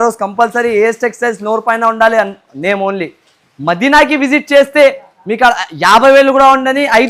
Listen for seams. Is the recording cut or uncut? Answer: uncut